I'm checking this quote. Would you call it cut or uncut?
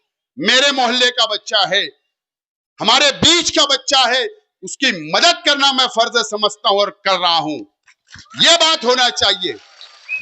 uncut